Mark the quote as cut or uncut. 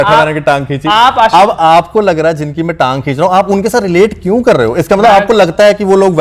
uncut